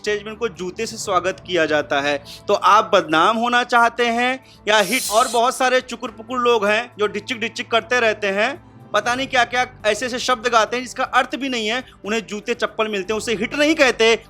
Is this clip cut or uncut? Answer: cut